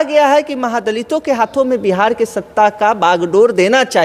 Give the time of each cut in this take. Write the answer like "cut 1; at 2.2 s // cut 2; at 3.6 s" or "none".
none